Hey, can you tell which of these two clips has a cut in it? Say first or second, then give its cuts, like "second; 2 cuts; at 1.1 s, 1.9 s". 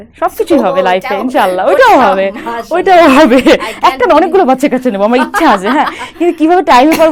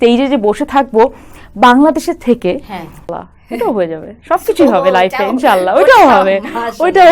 second; 1 cut; at 3.1 s